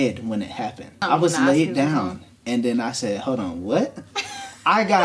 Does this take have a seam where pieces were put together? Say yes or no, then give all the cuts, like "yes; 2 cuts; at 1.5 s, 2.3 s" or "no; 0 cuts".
yes; 1 cut; at 1.0 s